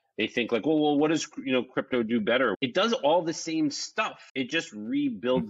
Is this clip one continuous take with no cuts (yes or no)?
no